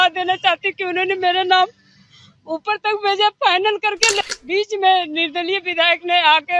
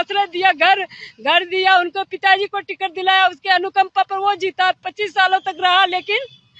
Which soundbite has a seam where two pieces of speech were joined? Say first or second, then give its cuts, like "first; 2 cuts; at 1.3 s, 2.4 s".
first; 1 cut; at 4.2 s